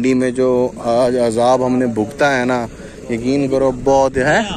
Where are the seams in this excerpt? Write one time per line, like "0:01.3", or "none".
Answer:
none